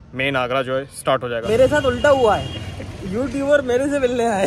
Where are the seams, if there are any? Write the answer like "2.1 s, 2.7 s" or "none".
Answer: 1.4 s